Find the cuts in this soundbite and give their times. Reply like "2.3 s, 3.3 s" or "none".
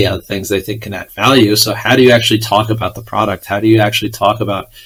none